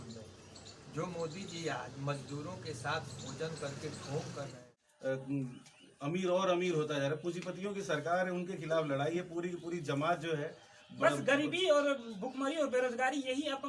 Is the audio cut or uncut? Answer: cut